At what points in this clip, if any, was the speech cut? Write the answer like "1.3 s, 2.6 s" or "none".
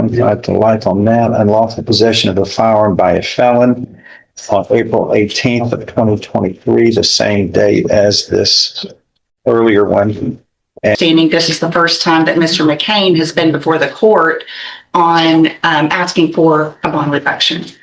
11.0 s